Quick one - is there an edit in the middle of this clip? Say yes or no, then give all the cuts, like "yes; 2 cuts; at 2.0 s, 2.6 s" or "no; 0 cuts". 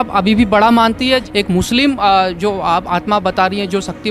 yes; 1 cut; at 1.2 s